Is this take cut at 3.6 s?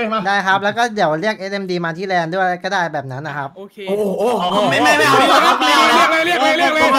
no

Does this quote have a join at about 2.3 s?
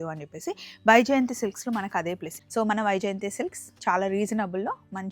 yes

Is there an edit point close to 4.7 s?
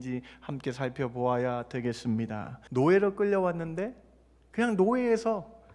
no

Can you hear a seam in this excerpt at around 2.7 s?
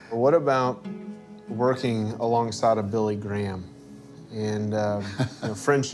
yes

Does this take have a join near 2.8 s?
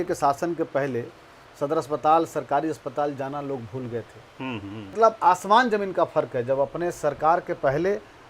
no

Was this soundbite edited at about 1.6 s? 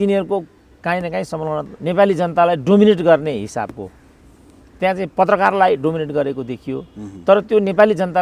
yes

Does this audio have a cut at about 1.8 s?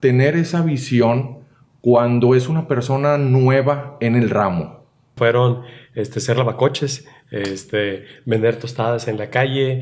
no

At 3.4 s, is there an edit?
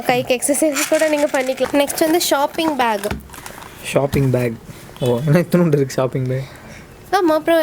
no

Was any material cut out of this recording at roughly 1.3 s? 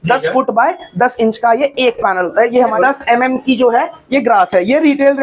no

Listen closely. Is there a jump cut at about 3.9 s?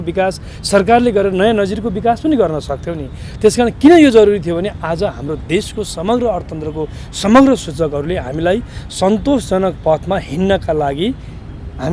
no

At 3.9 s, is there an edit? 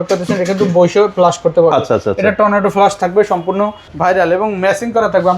yes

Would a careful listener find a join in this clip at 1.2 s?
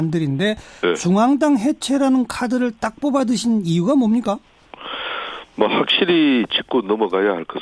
yes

